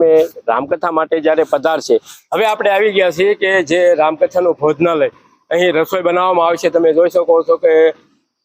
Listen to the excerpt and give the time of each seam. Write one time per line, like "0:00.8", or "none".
0:02.2